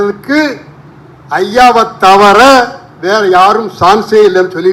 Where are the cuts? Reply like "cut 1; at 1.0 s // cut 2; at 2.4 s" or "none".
none